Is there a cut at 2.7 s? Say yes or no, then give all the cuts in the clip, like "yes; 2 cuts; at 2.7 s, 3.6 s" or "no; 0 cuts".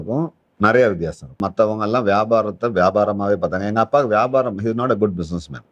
no; 1 cut; at 1.4 s